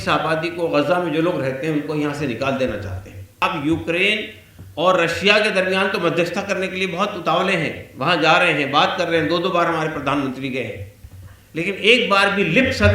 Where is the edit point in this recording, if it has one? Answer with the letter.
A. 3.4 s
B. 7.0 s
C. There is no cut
A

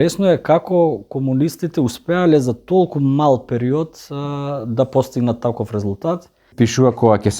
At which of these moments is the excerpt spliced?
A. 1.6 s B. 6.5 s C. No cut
B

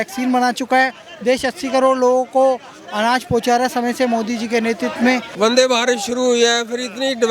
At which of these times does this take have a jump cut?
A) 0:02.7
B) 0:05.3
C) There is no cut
B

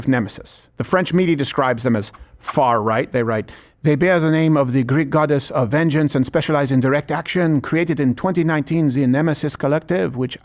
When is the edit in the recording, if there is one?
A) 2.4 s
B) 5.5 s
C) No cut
C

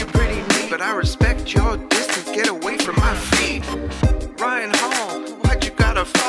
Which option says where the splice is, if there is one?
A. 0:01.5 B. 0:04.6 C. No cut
C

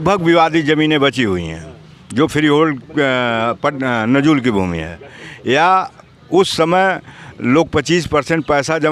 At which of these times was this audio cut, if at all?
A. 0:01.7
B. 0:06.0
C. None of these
C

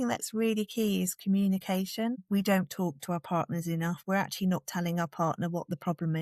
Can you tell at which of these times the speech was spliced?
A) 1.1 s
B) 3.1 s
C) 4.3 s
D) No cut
D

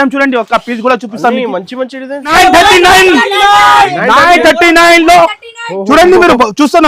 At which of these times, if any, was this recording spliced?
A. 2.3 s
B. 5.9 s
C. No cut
A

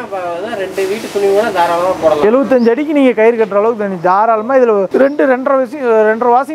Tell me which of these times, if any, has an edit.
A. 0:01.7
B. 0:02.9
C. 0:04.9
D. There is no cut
C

